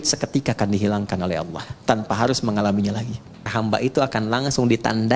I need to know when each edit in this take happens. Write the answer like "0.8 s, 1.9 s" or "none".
3.5 s